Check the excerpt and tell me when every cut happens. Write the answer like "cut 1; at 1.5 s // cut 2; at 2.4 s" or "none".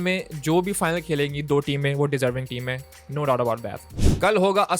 cut 1; at 3.9 s